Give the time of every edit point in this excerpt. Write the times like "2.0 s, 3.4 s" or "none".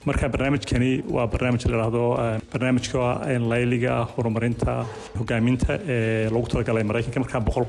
5.2 s